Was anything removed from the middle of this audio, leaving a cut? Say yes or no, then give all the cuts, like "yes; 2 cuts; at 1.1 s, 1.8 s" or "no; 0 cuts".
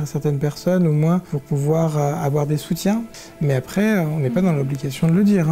yes; 2 cuts; at 1.3 s, 3.1 s